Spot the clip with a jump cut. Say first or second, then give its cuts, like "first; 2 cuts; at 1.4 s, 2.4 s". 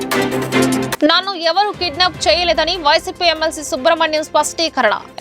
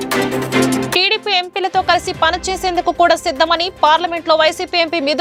first; 1 cut; at 0.9 s